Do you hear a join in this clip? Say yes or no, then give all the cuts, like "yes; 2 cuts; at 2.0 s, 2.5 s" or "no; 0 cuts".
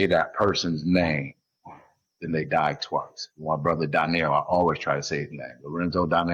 no; 0 cuts